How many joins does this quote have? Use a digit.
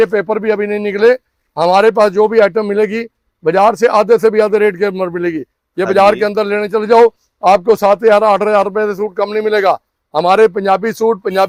0